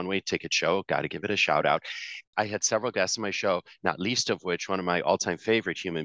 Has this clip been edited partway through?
yes; 1 cut; at 2.2 s

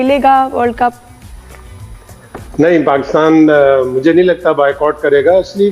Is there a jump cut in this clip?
no; 0 cuts

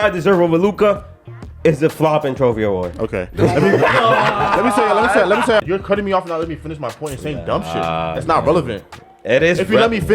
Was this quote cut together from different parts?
yes; 1 cut; at 5.6 s

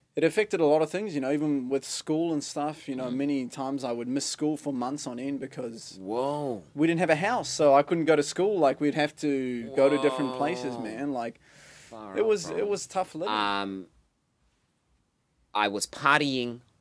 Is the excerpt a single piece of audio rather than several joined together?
no; 1 cut; at 13.2 s

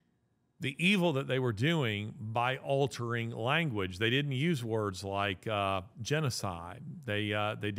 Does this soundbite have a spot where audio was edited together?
no; 0 cuts

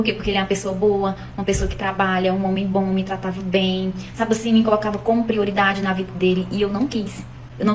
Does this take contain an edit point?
no; 0 cuts

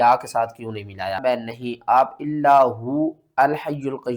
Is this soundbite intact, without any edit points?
no; 1 cut; at 1.2 s

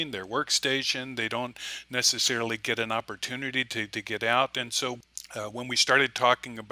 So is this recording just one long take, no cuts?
no; 1 cut; at 5.0 s

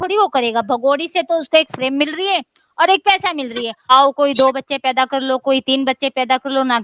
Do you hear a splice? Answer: yes; 1 cut; at 3.9 s

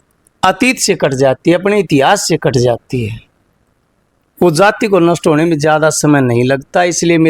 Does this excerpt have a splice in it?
no; 0 cuts

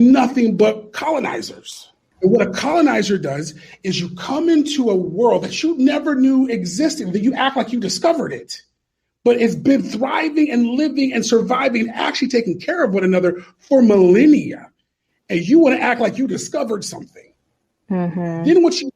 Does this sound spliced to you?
yes; 1 cut; at 2.1 s

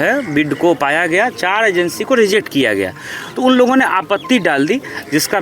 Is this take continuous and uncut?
yes; 0 cuts

